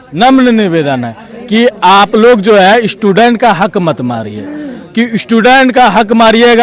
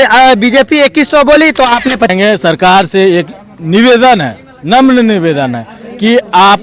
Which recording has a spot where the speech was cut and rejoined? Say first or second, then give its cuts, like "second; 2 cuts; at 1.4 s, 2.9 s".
second; 1 cut; at 2.1 s